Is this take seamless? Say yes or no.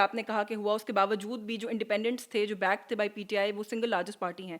yes